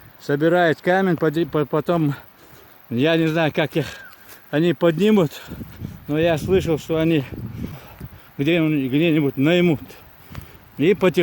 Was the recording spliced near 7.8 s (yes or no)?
yes